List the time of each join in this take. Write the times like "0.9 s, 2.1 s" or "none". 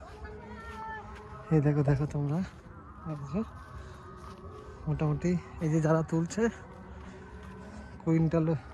none